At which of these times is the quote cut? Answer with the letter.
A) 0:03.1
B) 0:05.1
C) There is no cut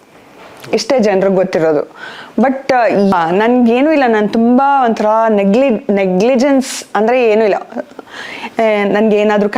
A